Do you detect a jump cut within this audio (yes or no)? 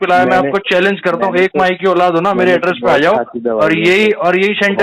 no